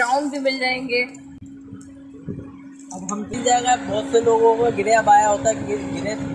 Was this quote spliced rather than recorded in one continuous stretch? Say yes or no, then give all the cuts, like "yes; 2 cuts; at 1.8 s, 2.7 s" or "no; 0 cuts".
no; 0 cuts